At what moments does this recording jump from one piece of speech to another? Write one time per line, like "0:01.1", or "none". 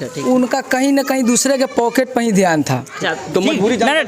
0:03.1